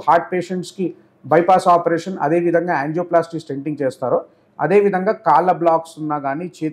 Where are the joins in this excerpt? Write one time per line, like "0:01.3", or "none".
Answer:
none